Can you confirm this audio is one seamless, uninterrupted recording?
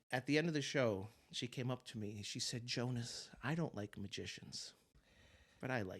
yes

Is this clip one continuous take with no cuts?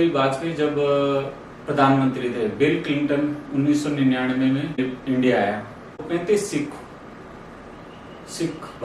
no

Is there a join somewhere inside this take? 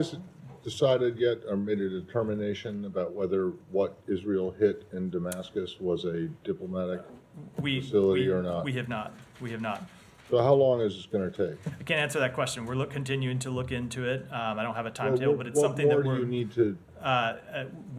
no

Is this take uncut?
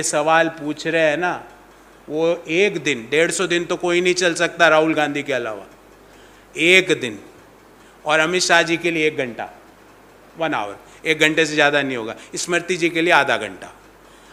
yes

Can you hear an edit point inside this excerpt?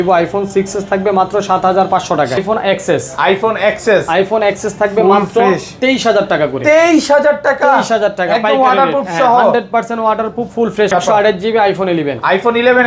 yes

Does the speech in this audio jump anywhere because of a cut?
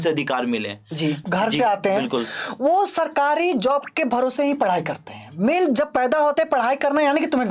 yes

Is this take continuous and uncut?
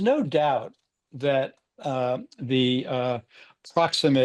yes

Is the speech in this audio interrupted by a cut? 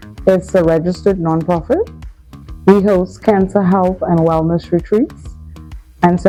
no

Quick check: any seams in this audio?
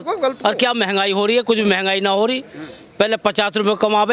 no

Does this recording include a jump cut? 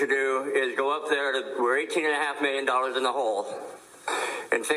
no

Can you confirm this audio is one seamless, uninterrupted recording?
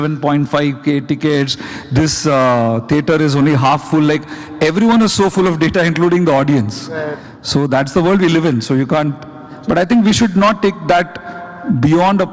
yes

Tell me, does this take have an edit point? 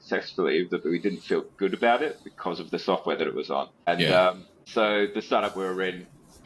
yes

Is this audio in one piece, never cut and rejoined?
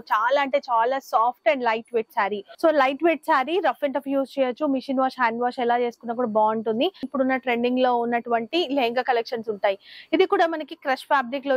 no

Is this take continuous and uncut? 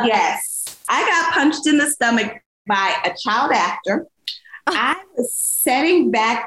yes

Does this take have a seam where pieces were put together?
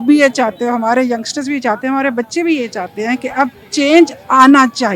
no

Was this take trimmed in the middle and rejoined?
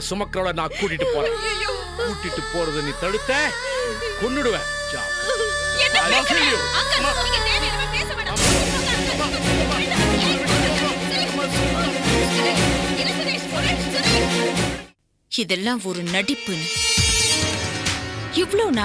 yes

